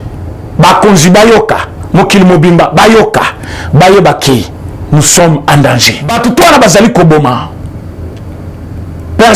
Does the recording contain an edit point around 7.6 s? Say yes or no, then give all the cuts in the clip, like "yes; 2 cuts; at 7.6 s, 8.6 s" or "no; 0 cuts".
no; 1 cut; at 6.1 s